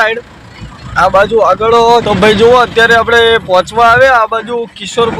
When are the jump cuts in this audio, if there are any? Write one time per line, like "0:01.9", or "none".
0:02.0